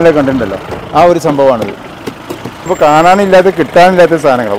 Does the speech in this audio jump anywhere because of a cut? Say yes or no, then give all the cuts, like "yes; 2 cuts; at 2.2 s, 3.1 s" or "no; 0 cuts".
yes; 1 cut; at 2.7 s